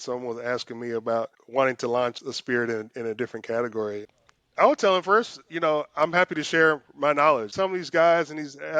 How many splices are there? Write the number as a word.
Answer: four